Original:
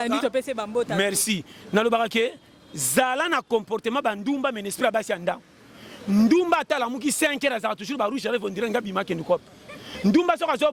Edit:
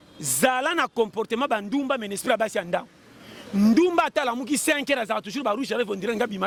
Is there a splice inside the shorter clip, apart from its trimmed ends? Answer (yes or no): no